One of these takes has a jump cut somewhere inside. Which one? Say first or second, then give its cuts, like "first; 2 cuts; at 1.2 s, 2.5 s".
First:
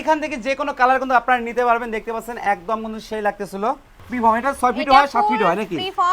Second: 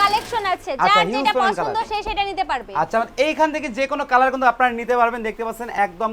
first; 1 cut; at 3.9 s